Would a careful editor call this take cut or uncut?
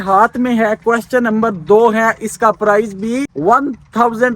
cut